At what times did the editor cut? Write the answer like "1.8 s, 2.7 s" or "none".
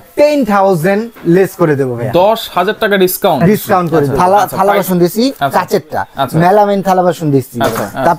4.1 s